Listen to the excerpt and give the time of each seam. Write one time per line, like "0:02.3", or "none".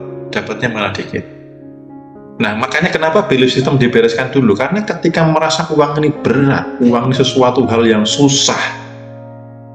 0:01.7